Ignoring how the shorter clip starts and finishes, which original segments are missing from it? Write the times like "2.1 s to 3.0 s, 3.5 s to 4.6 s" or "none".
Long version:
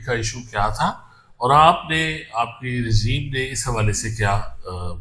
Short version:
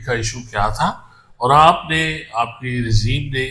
none